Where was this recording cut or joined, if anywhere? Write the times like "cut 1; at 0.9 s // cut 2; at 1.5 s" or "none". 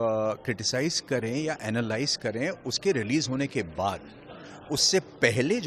none